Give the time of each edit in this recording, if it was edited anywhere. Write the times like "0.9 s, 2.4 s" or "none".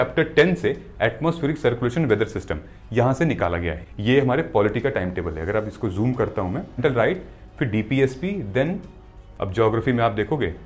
3.8 s, 6.8 s, 9.2 s

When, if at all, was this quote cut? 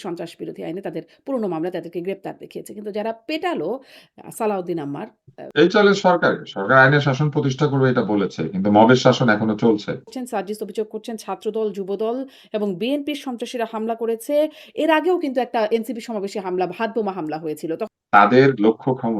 5.4 s, 10.2 s, 17.9 s

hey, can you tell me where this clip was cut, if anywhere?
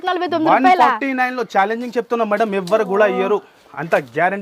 none

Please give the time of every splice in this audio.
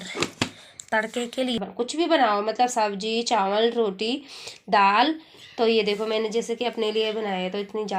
1.6 s

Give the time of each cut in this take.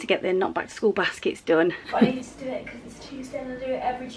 1.8 s

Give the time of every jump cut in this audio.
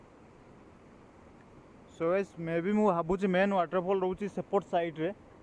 none

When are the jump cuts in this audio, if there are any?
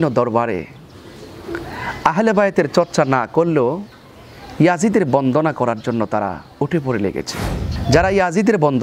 7.8 s

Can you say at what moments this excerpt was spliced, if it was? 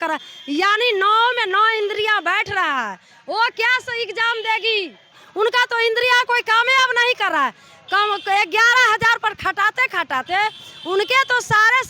5.2 s

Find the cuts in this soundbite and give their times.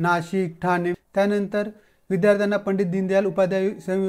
1.0 s

